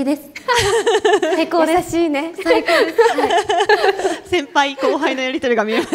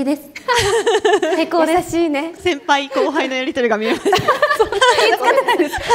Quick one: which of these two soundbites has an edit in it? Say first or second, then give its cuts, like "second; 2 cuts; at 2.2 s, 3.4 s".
second; 2 cuts; at 2.3 s, 5.0 s